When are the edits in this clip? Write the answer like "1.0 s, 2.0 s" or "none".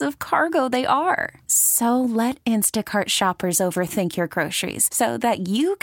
none